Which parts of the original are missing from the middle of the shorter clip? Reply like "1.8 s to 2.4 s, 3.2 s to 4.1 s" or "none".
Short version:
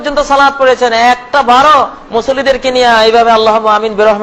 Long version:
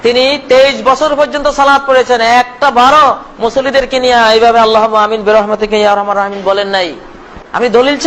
none